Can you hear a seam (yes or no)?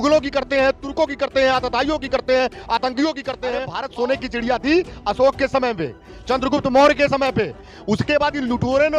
yes